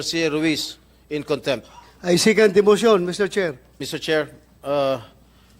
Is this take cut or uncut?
cut